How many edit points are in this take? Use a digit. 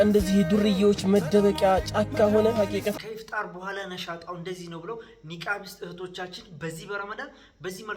1